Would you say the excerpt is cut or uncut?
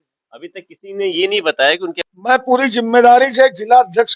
cut